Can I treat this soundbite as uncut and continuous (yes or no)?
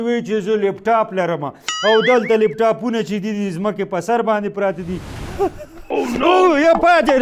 no